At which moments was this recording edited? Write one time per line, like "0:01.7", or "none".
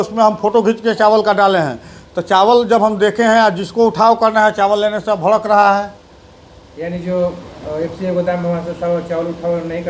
none